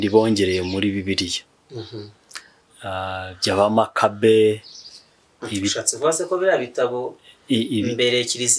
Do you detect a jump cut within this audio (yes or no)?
no